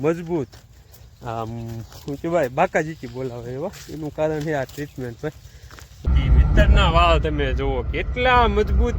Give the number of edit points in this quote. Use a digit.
1